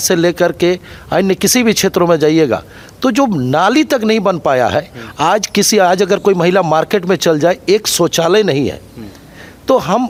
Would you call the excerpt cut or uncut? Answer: uncut